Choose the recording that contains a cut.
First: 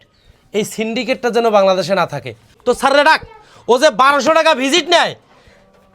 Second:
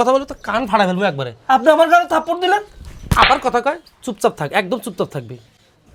first; 1 cut; at 2.6 s

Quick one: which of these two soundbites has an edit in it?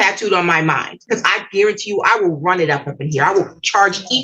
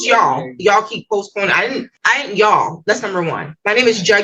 first; 1 cut; at 1.0 s

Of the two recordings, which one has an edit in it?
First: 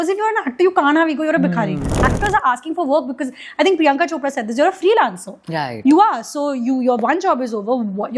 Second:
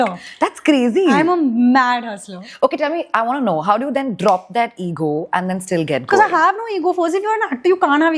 first; 1 cut; at 2.1 s

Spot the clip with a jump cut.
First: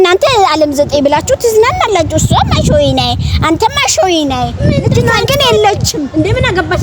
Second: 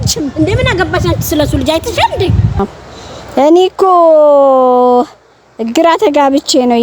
second; 1 cut; at 2.6 s

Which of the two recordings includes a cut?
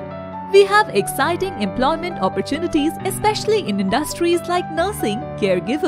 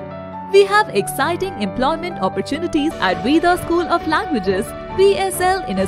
second; 1 cut; at 3.0 s

